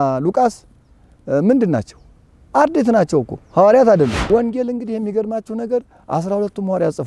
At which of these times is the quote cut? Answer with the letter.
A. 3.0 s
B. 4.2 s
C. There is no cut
B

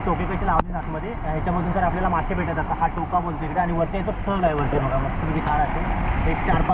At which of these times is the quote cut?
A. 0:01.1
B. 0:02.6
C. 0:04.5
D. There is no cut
D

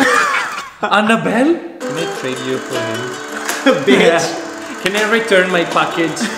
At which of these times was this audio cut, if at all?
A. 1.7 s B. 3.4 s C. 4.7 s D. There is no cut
A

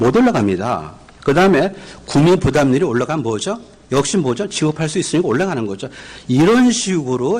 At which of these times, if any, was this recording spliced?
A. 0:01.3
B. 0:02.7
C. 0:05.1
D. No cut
C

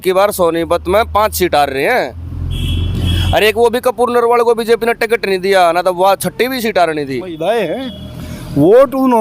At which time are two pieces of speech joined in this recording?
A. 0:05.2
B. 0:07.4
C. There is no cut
B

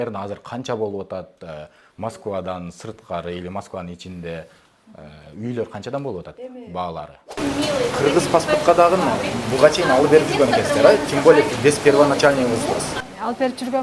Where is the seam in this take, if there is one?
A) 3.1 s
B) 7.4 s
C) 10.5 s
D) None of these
B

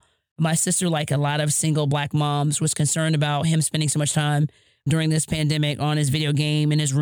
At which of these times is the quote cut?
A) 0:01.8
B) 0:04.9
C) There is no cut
B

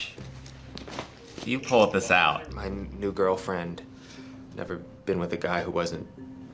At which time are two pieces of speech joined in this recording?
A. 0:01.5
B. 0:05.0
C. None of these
A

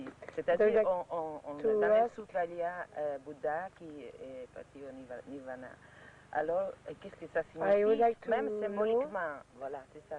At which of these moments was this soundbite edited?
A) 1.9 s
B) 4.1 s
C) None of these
B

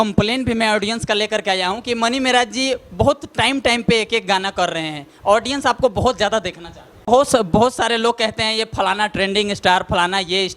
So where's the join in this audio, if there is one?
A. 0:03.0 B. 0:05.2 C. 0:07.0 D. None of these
C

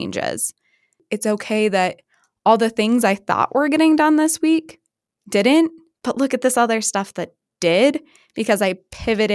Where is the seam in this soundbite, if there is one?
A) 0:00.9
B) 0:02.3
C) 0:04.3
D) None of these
A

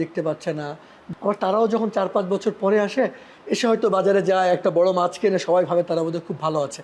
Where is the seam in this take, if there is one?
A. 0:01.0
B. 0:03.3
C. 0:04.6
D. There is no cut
A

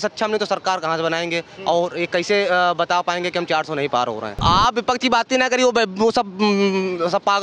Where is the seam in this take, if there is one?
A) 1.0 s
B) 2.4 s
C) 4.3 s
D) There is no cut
C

